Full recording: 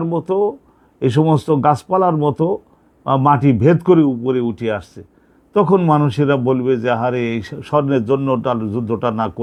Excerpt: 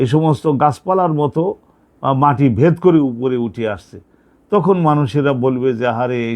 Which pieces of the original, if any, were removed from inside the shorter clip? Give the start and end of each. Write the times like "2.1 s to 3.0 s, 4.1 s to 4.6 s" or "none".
none